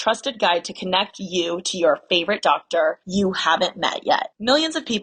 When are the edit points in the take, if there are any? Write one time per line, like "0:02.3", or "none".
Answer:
none